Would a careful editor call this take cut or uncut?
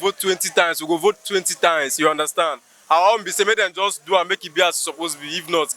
uncut